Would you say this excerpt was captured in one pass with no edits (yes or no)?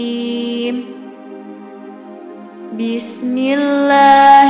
yes